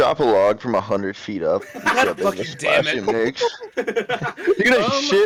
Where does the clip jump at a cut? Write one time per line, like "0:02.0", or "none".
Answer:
none